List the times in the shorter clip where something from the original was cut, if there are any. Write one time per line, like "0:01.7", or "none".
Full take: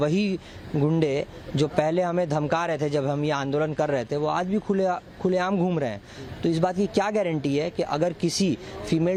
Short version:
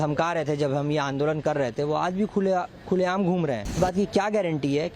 0:03.8